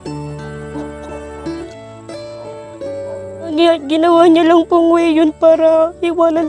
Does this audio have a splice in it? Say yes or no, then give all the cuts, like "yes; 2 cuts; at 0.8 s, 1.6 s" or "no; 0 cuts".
yes; 2 cuts; at 1.7 s, 3.5 s